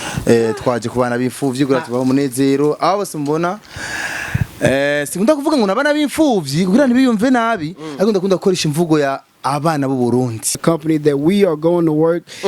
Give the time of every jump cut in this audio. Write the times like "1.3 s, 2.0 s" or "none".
10.6 s